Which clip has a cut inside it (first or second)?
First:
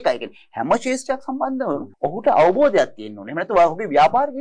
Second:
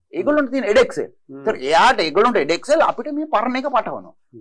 first